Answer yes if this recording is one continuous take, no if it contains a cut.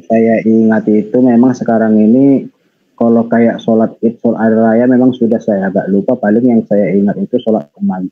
yes